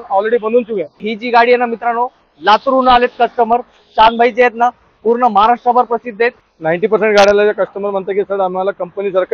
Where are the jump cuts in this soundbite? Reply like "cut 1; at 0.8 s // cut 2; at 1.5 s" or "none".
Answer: cut 1; at 1.0 s // cut 2; at 6.5 s